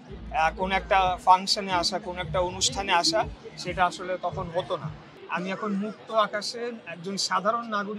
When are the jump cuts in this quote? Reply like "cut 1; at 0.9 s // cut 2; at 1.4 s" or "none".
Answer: cut 1; at 5.1 s